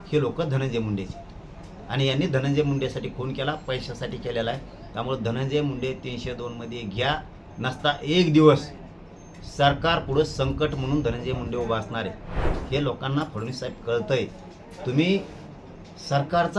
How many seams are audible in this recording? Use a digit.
1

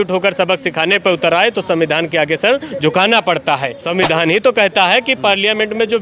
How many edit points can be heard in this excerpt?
1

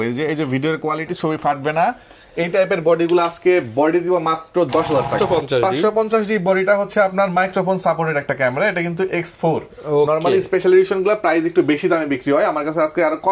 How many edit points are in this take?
1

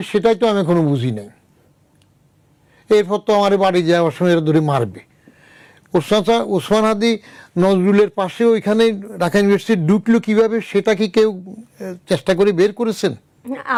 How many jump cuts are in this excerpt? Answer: 0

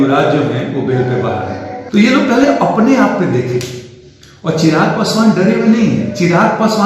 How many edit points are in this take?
1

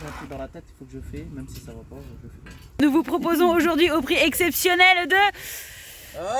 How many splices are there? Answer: 1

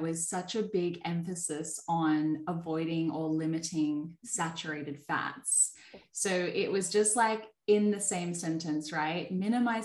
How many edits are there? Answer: 0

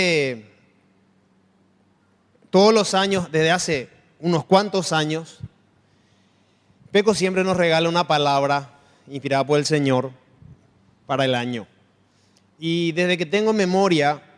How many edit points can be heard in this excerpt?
0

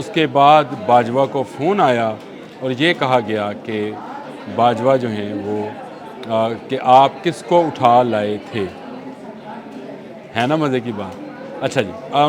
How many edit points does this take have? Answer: 0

